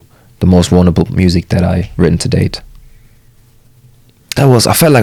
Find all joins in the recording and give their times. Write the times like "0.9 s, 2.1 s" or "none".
none